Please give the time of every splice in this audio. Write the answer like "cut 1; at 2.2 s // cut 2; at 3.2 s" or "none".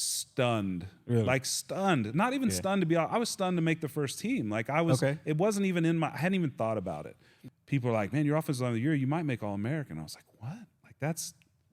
cut 1; at 7.4 s